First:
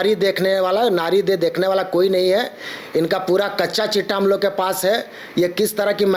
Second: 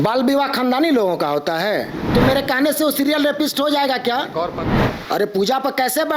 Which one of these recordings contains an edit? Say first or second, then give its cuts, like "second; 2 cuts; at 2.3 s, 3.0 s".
second; 2 cuts; at 2.0 s, 4.6 s